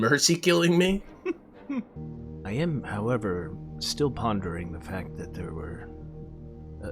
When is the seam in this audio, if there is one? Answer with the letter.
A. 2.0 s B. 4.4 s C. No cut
A